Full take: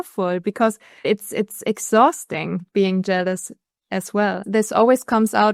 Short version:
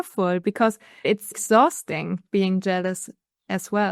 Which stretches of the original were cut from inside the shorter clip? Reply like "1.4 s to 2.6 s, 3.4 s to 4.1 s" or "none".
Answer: 1.3 s to 1.7 s

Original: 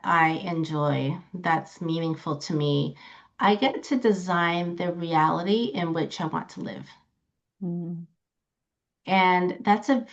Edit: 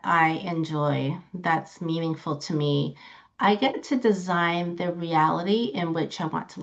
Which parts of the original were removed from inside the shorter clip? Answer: none

